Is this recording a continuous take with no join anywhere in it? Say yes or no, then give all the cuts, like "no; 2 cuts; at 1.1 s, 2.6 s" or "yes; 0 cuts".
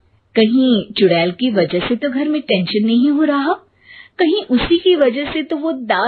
yes; 0 cuts